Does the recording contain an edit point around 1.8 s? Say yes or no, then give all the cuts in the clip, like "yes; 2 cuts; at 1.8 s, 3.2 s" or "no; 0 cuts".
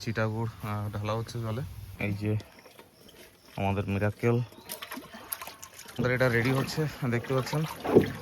yes; 2 cuts; at 1.8 s, 6.0 s